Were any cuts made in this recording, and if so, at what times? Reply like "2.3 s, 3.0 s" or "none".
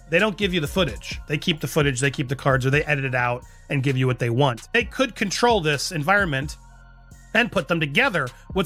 none